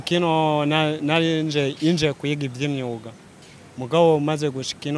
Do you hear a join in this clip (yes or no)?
no